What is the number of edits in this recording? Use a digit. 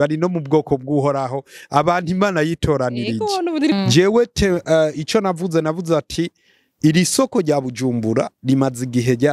1